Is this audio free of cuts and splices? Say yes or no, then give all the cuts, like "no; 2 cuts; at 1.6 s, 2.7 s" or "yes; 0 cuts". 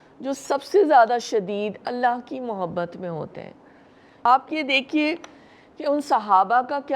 no; 1 cut; at 4.2 s